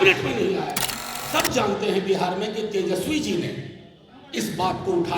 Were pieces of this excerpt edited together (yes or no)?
yes